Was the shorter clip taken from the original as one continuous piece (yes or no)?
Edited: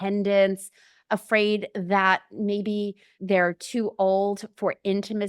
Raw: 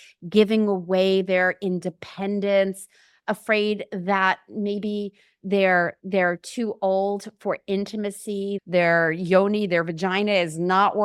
no